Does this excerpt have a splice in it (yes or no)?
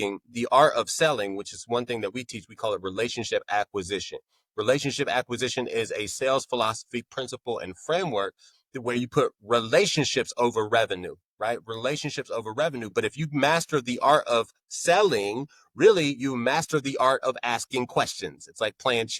no